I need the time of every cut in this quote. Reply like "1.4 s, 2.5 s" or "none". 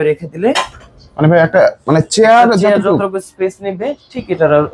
none